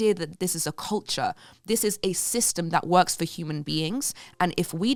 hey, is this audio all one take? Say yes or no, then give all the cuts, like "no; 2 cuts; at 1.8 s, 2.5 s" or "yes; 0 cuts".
yes; 0 cuts